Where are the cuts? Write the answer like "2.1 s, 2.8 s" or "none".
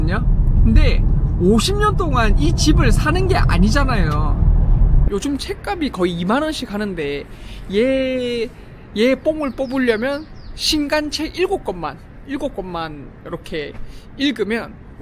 5.0 s